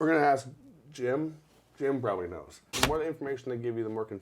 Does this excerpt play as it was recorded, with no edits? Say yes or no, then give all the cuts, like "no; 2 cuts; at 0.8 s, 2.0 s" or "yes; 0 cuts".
no; 1 cut; at 2.8 s